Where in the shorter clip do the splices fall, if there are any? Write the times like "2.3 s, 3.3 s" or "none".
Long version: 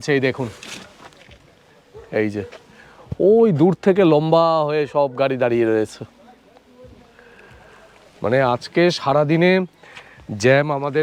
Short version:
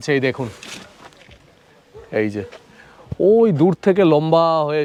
none